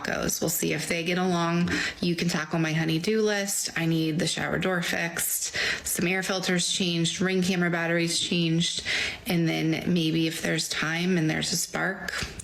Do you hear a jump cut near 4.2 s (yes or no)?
no